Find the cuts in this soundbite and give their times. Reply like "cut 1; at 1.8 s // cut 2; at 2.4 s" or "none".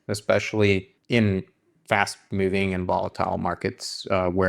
cut 1; at 0.9 s